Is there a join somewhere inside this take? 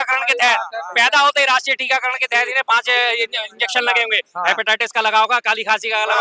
no; 0 cuts

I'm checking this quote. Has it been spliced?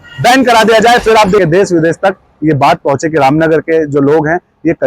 yes; 1 cut; at 1.4 s

